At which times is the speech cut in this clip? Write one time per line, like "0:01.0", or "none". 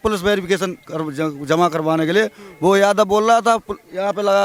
none